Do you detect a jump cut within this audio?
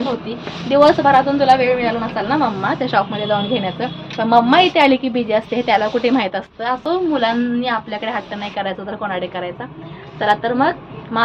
no; 0 cuts

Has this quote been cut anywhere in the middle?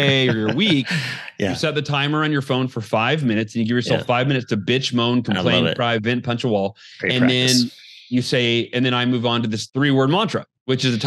yes; 1 cut; at 9.7 s

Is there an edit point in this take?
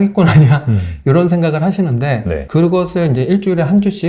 yes; 1 cut; at 2.4 s

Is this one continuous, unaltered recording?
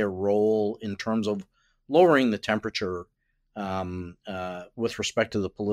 yes; 0 cuts

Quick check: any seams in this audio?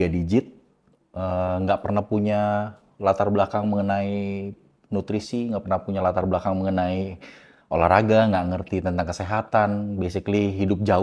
no; 0 cuts

